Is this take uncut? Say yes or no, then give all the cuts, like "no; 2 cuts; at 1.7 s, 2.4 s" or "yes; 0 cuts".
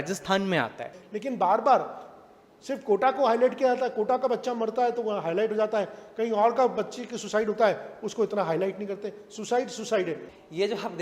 no; 2 cuts; at 0.9 s, 10.2 s